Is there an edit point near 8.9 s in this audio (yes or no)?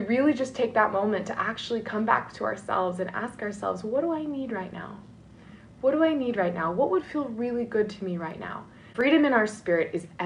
yes